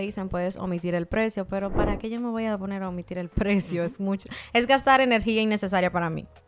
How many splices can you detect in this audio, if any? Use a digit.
0